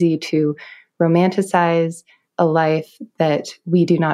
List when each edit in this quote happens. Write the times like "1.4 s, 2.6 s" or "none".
none

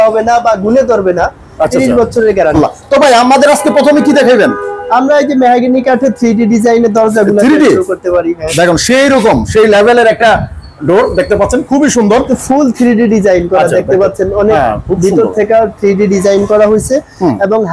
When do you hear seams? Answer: none

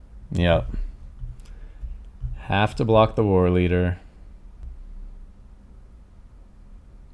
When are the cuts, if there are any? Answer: 4.6 s

